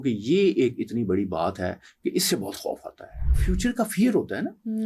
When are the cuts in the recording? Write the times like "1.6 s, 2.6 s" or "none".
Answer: 3.3 s